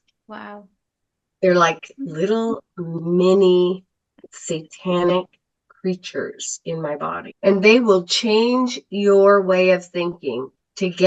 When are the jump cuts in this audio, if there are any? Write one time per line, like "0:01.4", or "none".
0:07.3